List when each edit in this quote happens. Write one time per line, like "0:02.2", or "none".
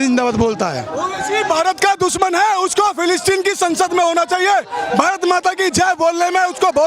none